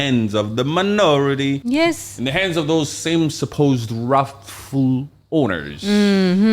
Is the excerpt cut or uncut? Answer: cut